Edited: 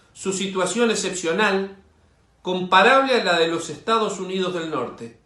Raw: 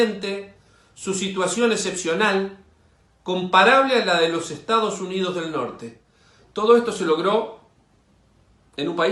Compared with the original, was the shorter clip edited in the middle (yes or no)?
no